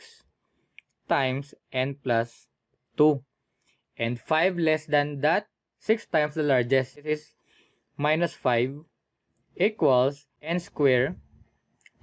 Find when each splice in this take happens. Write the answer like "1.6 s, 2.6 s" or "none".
7.1 s, 10.3 s